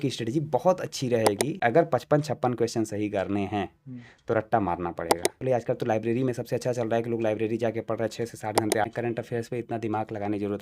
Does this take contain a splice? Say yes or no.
yes